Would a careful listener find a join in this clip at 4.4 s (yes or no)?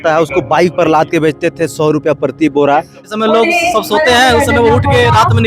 no